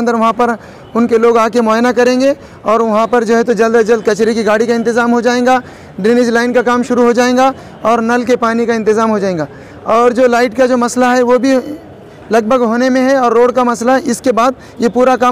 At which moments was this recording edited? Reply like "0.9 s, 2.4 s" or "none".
none